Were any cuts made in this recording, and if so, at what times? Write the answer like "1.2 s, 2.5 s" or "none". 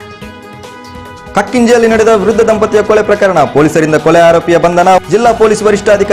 none